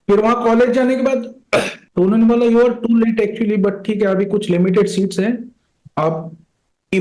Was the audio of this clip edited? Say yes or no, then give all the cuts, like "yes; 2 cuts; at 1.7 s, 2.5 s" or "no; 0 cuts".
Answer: yes; 1 cut; at 1.8 s